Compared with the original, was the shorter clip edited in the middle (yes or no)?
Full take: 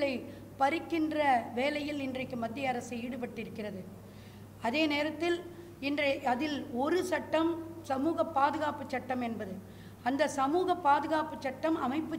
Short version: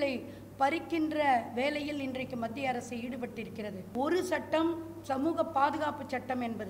yes